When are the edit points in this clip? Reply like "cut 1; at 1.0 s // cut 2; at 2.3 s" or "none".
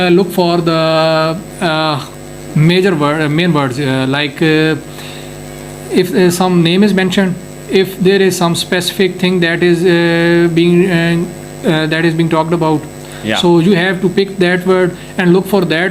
none

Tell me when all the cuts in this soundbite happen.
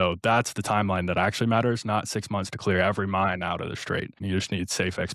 cut 1; at 4.2 s

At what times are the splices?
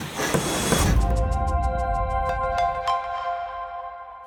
none

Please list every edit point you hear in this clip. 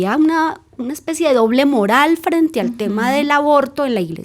none

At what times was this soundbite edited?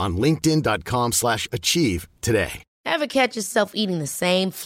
cut 1; at 2.7 s

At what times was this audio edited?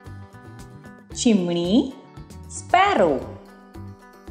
cut 1; at 1.2 s // cut 2; at 3.4 s

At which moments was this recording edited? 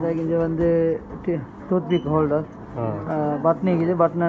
none

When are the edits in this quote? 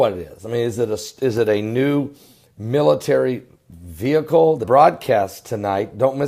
none

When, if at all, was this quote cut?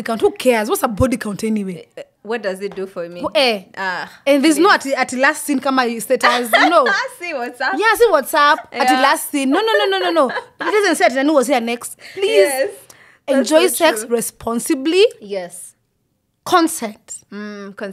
none

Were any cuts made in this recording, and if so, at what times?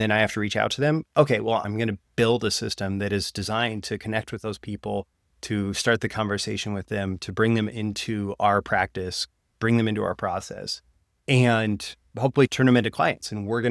cut 1; at 1.6 s // cut 2; at 12.5 s

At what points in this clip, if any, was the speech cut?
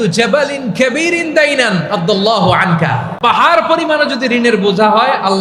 cut 1; at 3.1 s

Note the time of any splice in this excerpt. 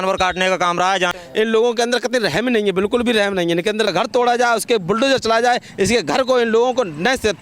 cut 1; at 1.1 s // cut 2; at 3.9 s

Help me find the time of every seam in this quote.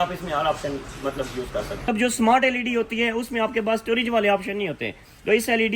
cut 1; at 1.9 s

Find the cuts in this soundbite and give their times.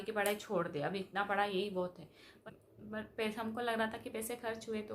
cut 1; at 2.4 s

